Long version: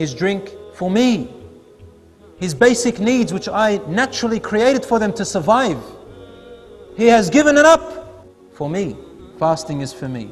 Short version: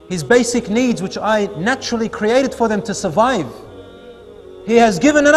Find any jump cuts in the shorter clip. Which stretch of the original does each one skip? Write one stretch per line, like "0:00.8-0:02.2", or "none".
none